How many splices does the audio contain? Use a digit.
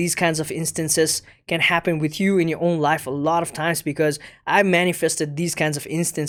0